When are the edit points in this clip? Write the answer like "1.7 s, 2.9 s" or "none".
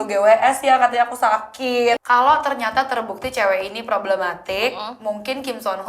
2.0 s